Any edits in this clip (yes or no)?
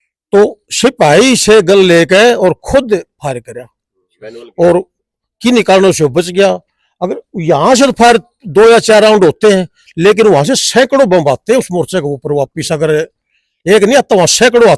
no